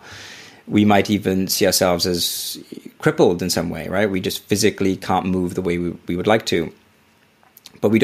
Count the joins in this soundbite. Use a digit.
0